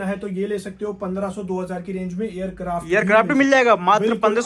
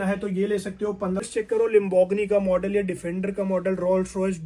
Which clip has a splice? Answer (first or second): second